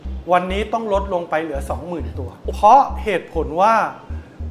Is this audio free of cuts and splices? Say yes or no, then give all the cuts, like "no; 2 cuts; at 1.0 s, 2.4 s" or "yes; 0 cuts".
no; 1 cut; at 2.4 s